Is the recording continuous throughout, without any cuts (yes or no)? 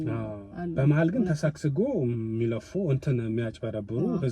yes